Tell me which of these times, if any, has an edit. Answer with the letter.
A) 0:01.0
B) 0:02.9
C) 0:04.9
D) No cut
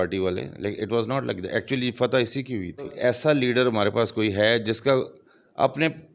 B